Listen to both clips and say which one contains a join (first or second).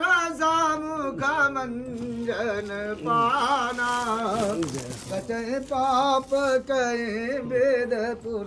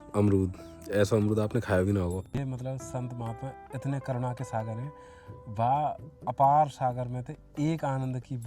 second